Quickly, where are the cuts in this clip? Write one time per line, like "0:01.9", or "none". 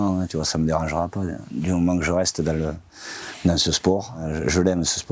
0:04.2